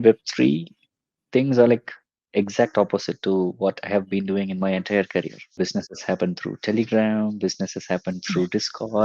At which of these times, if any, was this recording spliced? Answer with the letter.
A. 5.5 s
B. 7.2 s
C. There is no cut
A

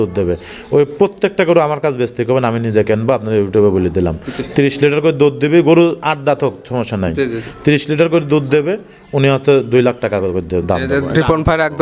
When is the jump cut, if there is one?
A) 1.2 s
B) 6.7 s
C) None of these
C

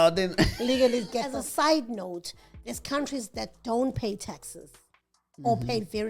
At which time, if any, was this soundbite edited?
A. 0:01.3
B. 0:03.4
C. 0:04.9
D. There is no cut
A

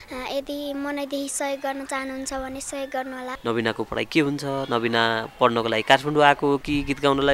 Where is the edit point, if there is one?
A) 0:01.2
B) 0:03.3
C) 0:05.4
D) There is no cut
B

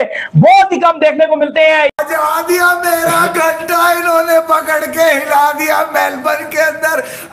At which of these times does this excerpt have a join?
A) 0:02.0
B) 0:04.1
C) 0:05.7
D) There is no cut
A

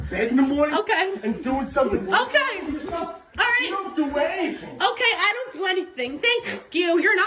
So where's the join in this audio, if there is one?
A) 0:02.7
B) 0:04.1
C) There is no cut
C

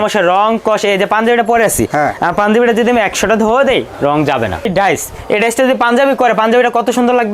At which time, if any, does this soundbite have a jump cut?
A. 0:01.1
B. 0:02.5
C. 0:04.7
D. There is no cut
C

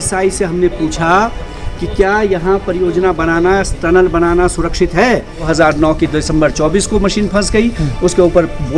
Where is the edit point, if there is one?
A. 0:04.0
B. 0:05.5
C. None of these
B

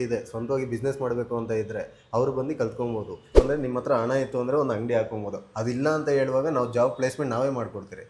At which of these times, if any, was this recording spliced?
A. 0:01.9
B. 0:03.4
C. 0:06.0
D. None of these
B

